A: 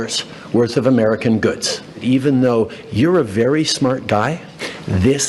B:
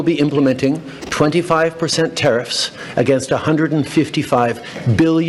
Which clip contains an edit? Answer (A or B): A